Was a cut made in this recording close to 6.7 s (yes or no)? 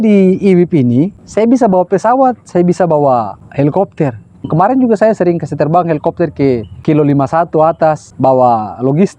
yes